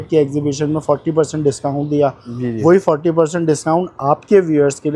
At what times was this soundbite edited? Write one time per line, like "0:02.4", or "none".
none

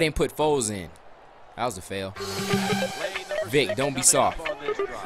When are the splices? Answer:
none

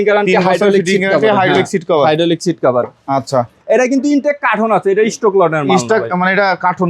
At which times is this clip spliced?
0:03.6

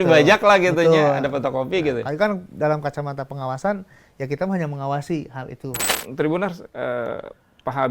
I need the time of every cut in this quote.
0:05.9

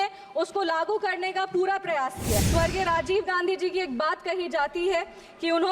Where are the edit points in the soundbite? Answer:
0:02.4

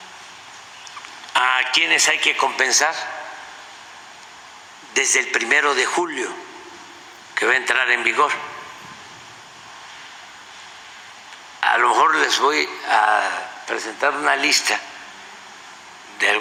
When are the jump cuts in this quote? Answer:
none

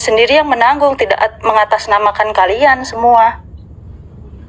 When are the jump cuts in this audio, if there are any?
none

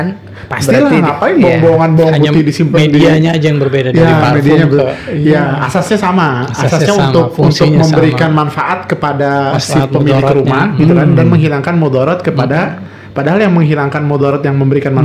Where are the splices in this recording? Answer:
none

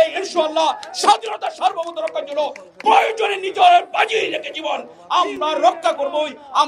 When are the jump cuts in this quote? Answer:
none

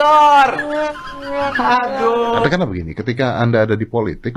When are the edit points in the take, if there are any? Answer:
0:02.5

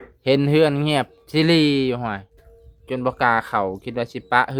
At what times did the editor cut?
none

